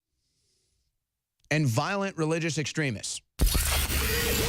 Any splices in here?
yes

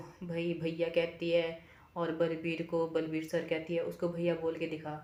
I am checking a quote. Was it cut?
no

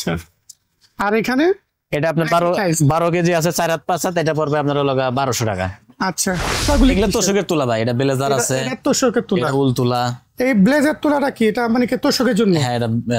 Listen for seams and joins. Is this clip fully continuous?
no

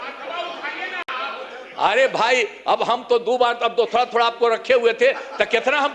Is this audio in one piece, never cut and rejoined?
yes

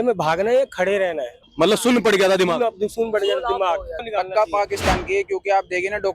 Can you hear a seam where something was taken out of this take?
yes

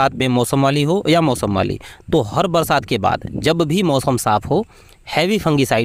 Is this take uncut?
yes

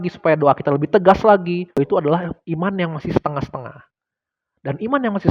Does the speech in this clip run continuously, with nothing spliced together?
no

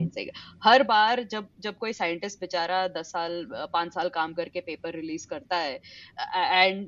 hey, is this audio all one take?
yes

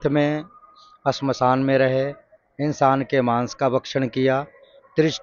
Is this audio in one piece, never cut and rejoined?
yes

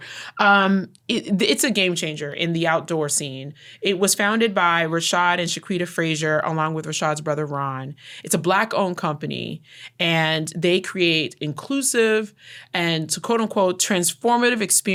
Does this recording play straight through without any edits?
yes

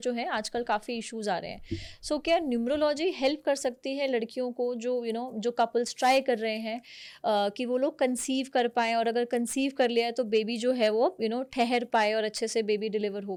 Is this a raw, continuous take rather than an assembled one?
yes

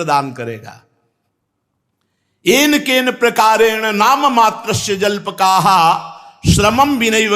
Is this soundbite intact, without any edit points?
yes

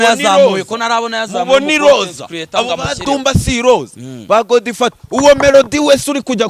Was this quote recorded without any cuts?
yes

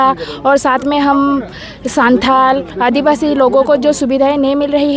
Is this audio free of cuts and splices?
yes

